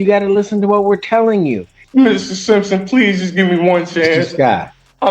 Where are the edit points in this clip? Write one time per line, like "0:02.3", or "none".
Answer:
0:01.7